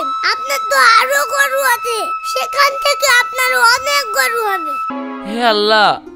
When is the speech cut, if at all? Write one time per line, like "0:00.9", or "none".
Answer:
0:04.9